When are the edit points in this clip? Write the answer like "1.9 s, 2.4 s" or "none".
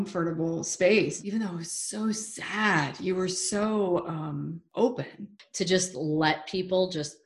1.2 s, 4.6 s, 5.4 s